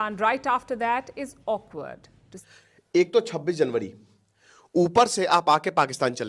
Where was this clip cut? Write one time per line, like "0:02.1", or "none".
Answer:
0:02.2